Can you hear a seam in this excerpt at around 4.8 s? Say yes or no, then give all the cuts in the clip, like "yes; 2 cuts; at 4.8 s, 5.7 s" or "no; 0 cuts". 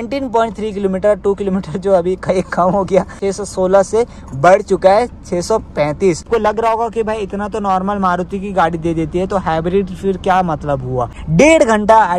no; 3 cuts; at 3.2 s, 6.2 s, 11.2 s